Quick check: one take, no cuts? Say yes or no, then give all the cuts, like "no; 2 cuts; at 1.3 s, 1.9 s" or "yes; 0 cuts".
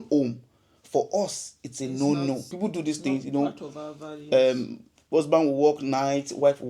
no; 1 cut; at 2.5 s